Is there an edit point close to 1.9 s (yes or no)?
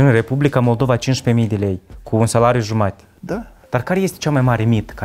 no